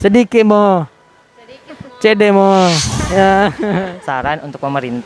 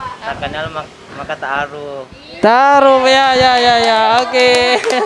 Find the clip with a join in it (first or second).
first